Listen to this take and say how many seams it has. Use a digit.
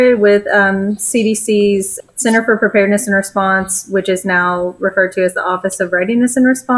1